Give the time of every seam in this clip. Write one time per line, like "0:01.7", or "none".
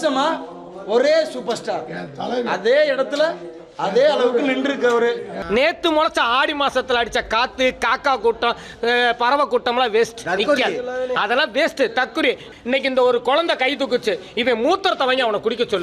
0:05.3
0:12.5